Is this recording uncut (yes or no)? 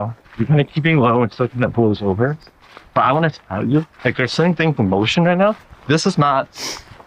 yes